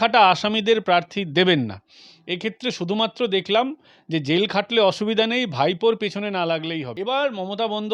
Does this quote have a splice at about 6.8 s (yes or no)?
yes